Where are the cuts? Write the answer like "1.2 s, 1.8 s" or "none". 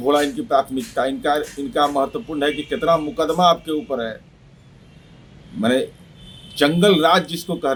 none